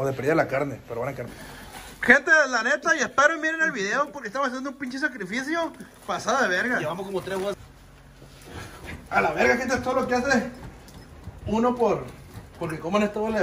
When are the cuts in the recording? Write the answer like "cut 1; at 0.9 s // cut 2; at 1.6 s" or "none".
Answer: cut 1; at 1.4 s // cut 2; at 7.7 s